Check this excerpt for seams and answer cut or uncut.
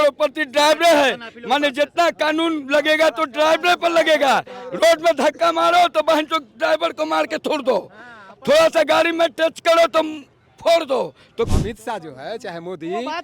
cut